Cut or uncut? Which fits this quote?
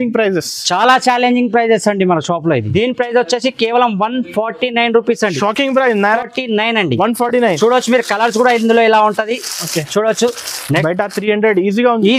cut